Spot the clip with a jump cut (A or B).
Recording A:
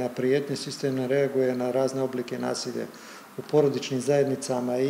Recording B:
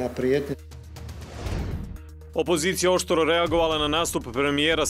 B